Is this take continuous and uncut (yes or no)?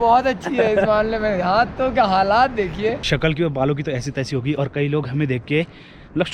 no